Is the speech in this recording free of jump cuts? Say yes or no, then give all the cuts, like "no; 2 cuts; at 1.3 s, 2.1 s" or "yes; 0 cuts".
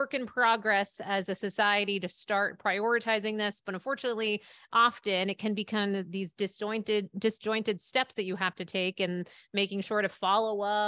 yes; 0 cuts